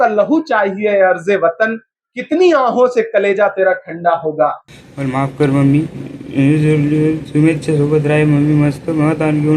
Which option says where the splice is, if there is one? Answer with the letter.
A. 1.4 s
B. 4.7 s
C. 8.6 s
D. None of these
B